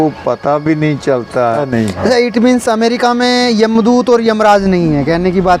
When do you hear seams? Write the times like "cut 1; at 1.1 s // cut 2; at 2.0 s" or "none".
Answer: cut 1; at 1.6 s